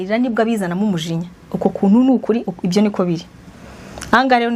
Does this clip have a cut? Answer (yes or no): no